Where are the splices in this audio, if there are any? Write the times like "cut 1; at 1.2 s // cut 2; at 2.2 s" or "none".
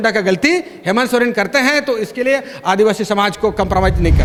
none